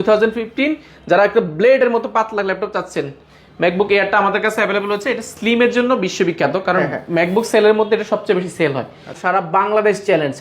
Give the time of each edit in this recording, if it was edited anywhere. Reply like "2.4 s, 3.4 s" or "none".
9.1 s